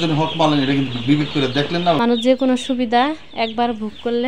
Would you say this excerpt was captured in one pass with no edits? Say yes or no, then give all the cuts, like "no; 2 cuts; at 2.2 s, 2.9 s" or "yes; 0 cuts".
no; 1 cut; at 2.0 s